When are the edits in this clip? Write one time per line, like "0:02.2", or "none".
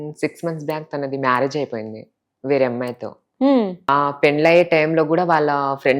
0:03.9